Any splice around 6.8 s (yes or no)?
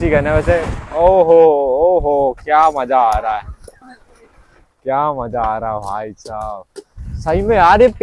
no